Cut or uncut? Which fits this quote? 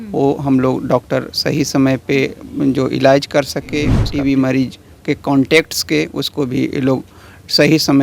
cut